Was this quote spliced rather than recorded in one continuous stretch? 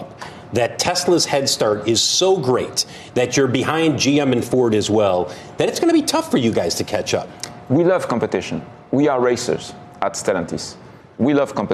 no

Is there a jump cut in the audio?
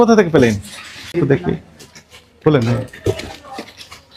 no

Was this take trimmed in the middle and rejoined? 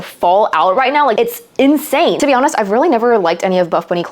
yes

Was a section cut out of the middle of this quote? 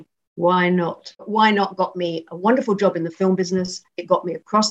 yes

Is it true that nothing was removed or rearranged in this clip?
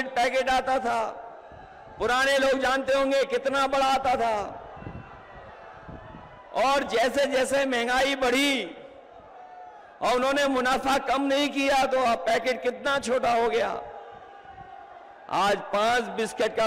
yes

